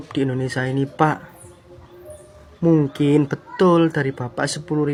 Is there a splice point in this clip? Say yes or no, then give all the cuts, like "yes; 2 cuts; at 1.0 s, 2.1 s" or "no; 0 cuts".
no; 0 cuts